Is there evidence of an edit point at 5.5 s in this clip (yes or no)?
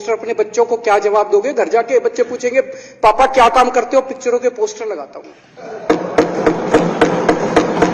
no